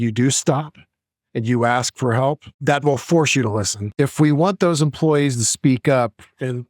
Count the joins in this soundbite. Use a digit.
2